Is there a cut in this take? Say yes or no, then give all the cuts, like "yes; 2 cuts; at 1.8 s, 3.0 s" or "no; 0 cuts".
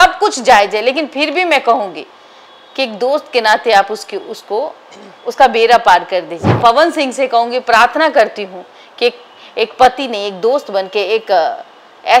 yes; 1 cut; at 6.5 s